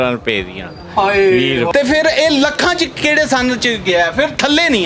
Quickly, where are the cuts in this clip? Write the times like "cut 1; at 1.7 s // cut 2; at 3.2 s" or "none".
cut 1; at 1.7 s